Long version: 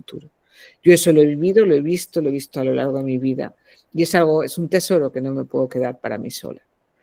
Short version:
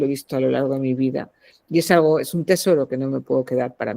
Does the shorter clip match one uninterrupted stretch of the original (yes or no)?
yes